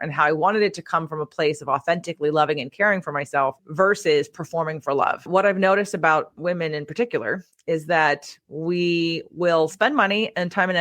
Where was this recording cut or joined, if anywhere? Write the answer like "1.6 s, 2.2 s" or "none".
3.6 s, 5.2 s